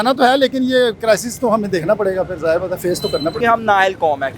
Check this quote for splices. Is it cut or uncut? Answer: cut